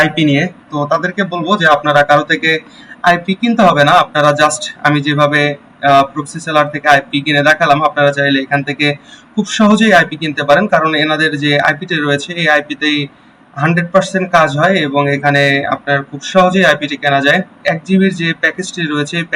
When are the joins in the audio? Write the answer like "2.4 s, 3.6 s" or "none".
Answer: 17.6 s